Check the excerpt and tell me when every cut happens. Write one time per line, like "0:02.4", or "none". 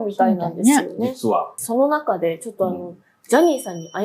0:01.6